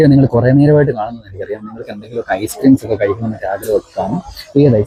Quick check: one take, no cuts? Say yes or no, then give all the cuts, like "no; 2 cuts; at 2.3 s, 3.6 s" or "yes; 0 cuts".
yes; 0 cuts